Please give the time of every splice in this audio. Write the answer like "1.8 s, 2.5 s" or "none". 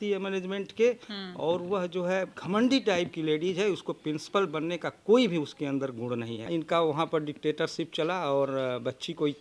2.4 s, 6.4 s